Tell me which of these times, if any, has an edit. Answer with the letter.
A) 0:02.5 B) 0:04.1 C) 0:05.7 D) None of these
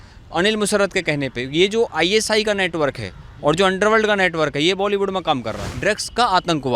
C